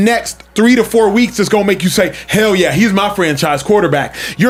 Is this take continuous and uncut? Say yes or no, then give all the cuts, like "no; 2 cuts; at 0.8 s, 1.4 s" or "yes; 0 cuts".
yes; 0 cuts